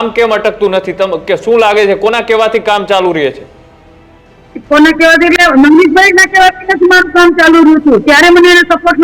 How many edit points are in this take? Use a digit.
0